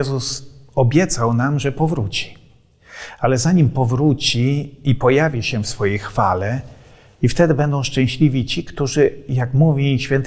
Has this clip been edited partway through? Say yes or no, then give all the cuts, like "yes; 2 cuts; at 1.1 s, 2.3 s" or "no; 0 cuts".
no; 0 cuts